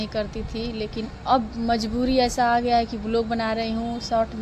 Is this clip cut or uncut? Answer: uncut